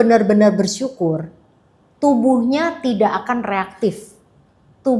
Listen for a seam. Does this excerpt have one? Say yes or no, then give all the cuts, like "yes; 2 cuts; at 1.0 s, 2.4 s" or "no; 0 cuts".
no; 0 cuts